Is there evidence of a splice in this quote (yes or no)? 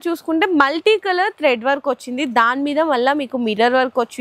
no